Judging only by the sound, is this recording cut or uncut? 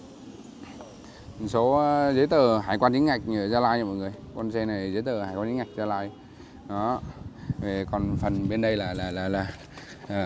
uncut